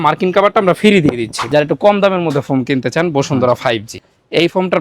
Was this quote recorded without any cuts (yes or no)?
no